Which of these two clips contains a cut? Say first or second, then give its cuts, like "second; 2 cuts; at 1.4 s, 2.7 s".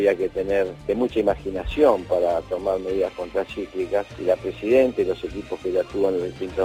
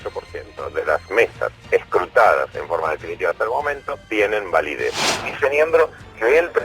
second; 1 cut; at 5.0 s